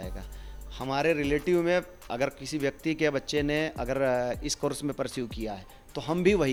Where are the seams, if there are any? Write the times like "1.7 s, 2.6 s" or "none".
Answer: none

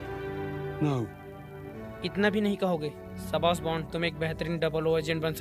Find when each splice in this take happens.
1.8 s

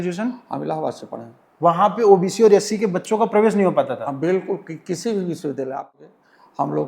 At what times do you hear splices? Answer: 6.0 s

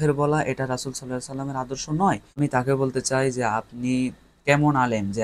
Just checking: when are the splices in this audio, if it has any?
2.4 s

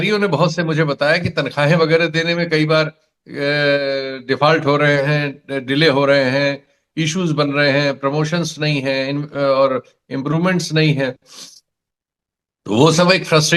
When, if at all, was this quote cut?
none

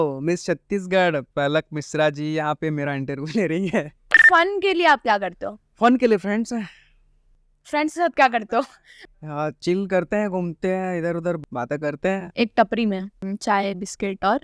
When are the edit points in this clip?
1.3 s, 4.2 s, 11.4 s, 13.2 s

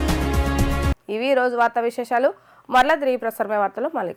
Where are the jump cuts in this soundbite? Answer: none

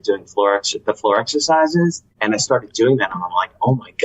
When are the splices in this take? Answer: 2.1 s

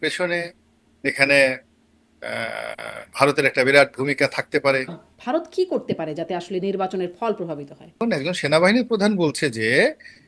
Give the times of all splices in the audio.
5.1 s, 8.0 s

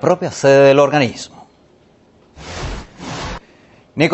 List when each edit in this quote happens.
1.7 s

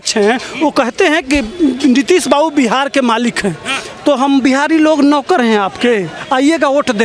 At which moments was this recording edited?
6.2 s

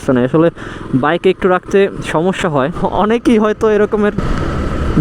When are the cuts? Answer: 2.8 s

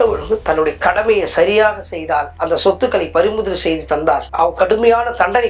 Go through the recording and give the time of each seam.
none

